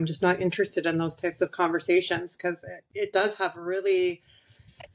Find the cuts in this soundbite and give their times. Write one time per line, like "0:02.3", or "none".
none